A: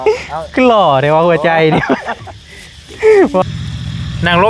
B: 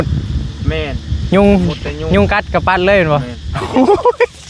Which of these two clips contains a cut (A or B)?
A